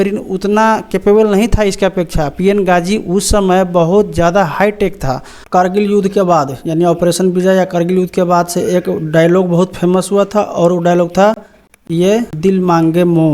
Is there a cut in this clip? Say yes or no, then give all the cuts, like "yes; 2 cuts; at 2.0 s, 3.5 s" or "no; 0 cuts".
yes; 2 cuts; at 5.5 s, 12.3 s